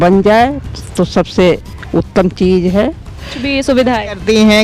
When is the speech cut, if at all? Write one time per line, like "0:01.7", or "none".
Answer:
0:03.5